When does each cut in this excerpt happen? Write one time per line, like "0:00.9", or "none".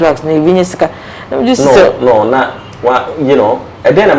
none